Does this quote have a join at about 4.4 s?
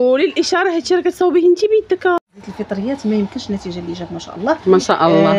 no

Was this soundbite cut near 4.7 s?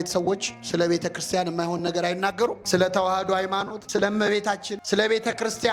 yes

